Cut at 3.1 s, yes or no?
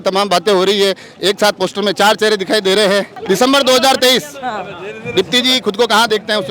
no